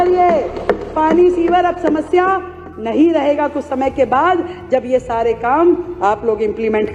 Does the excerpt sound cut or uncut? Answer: uncut